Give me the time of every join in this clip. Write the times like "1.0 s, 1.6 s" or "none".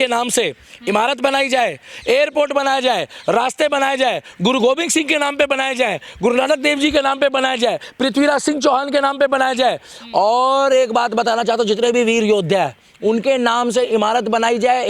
none